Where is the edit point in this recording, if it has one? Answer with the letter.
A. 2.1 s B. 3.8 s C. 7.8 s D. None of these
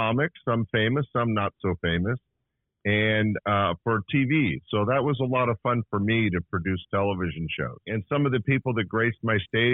C